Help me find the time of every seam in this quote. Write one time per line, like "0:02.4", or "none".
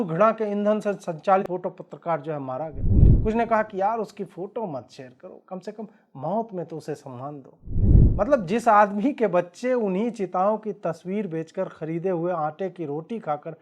0:01.4